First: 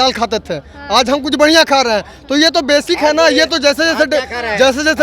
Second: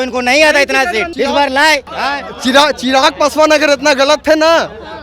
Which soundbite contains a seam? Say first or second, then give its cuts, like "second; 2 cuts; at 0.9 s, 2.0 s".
second; 2 cuts; at 1.1 s, 1.9 s